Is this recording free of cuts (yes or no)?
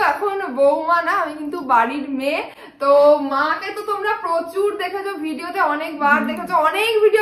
yes